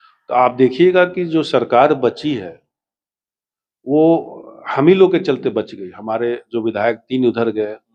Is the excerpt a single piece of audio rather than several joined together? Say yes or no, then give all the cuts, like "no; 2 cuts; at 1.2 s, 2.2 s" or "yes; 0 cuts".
yes; 0 cuts